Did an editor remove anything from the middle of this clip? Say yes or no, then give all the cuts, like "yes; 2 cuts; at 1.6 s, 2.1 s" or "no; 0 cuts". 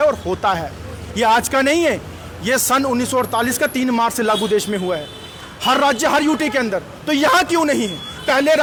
no; 0 cuts